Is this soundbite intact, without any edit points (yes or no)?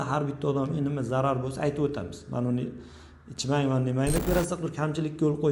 no